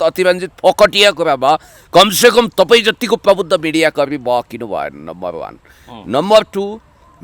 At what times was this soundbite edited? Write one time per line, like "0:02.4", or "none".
none